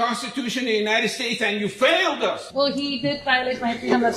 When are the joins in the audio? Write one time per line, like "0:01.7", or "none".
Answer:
0:02.4